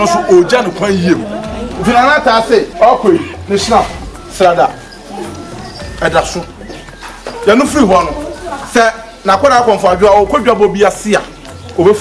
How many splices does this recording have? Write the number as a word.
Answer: one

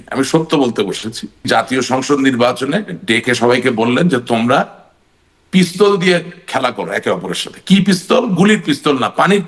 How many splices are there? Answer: one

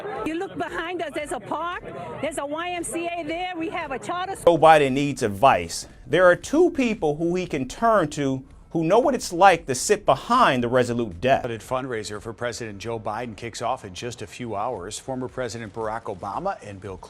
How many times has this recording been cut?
two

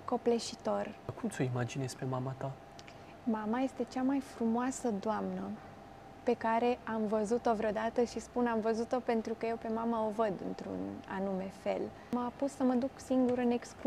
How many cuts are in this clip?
two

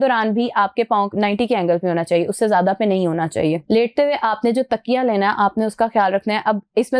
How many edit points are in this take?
two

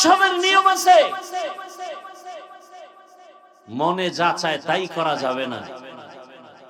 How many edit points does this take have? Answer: zero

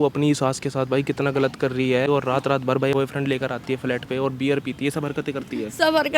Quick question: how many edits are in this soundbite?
one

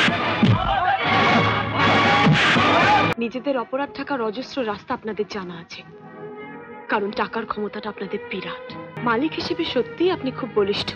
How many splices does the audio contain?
two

